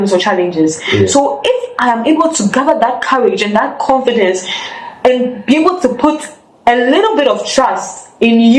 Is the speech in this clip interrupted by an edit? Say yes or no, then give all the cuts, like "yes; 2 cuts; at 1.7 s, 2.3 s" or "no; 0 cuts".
no; 0 cuts